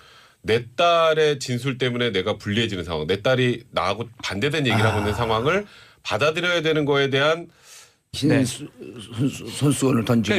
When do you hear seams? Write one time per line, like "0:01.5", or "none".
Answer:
none